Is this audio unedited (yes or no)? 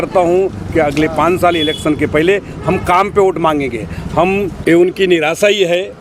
no